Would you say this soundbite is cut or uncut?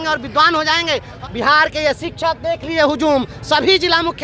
cut